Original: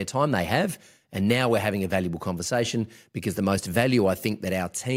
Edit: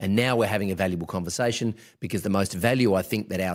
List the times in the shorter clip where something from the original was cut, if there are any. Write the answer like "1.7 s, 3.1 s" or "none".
none